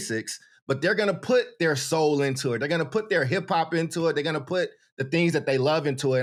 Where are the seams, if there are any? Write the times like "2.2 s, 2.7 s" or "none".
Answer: none